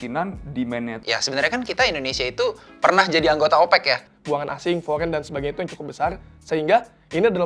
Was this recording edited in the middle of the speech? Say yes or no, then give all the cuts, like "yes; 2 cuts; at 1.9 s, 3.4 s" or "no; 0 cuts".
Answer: yes; 2 cuts; at 1.0 s, 4.1 s